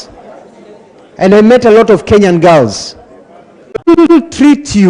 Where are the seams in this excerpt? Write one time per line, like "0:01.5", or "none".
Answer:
0:04.0